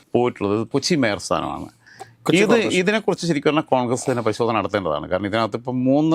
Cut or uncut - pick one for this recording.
uncut